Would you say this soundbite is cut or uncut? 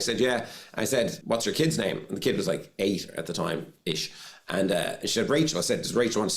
cut